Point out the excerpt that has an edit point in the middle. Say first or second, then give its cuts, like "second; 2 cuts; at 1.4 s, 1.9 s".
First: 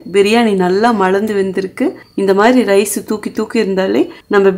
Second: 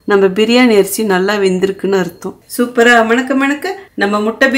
second; 1 cut; at 2.4 s